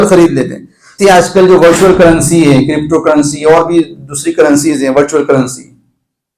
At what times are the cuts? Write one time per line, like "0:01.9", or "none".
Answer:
0:01.0

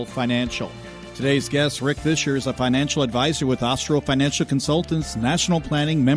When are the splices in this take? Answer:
0:01.1

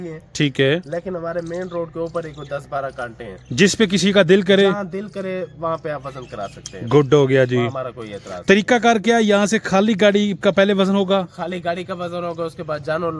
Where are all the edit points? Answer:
none

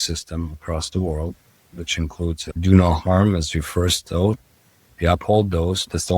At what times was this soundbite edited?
0:04.1

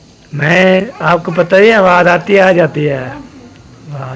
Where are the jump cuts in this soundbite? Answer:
none

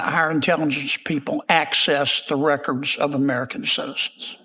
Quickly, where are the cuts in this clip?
none

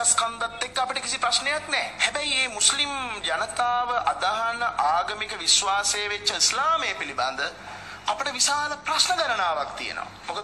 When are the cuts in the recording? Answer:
0:04.2

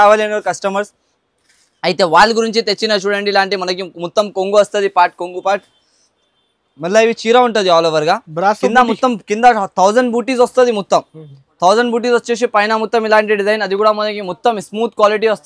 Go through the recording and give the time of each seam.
none

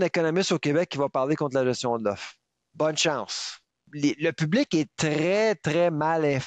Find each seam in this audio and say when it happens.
0:03.9

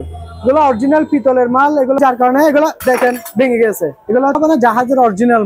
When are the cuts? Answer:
0:02.0
0:04.4

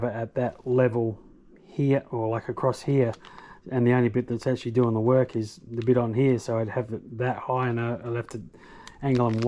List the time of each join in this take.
none

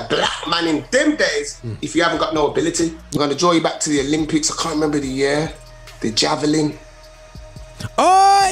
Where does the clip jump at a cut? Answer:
0:03.1

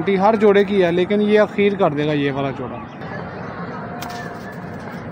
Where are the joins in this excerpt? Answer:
0:03.0

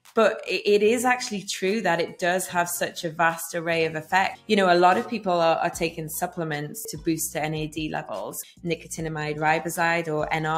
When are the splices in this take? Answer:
0:04.4
0:06.9
0:08.4

